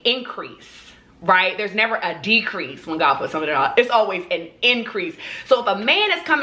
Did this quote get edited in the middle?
no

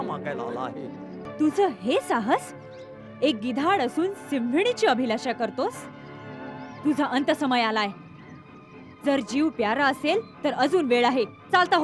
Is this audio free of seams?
no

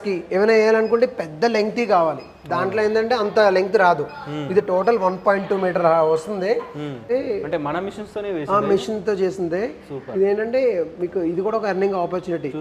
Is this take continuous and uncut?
no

